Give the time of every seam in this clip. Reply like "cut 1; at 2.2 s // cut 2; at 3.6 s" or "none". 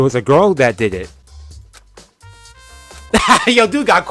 none